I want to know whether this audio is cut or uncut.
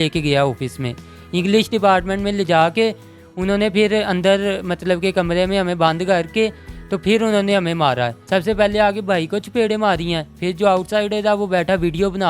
uncut